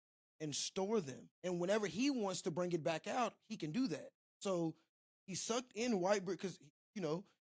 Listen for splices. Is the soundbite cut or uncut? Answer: cut